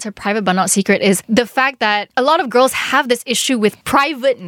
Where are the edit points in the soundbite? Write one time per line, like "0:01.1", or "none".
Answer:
0:01.2